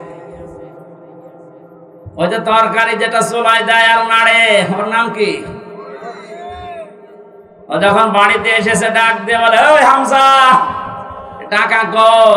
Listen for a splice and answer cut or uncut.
uncut